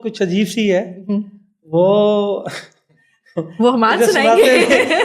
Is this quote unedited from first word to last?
yes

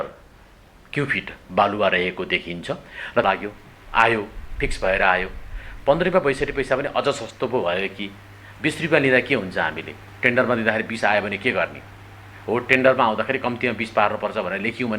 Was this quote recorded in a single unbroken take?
no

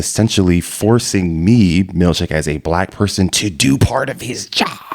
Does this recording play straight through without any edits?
yes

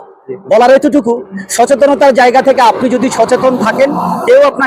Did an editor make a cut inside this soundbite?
no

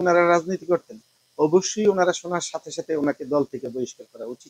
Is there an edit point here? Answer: no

